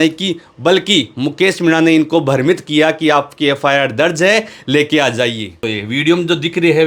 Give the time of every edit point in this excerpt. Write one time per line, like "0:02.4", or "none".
0:05.7